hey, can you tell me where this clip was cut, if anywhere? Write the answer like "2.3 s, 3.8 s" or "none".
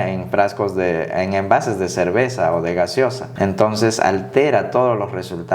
3.2 s